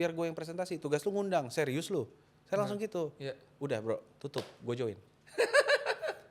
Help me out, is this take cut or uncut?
uncut